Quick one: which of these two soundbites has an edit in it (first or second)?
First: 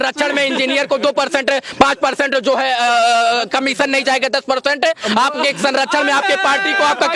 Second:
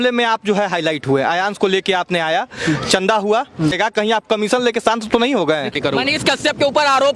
second